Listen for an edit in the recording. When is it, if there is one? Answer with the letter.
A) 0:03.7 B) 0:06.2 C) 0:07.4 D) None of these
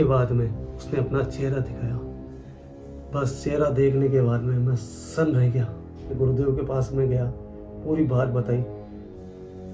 B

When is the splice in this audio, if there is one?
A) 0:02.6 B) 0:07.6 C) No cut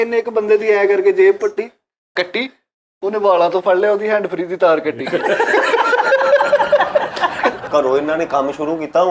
B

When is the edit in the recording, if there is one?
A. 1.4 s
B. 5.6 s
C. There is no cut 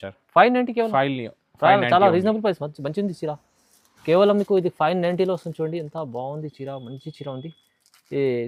C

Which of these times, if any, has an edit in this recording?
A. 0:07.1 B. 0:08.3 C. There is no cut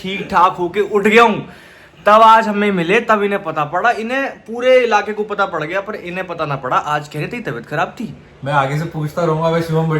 B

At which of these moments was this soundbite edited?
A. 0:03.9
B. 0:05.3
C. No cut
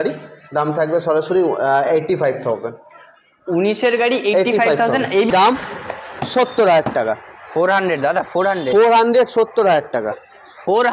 B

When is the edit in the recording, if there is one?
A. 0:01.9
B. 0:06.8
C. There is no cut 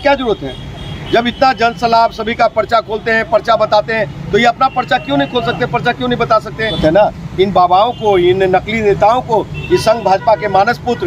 B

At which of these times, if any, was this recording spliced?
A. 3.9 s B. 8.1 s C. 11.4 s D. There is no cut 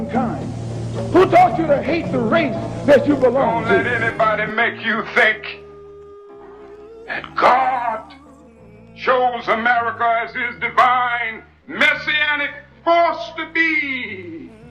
A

